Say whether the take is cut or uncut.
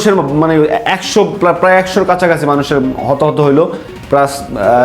uncut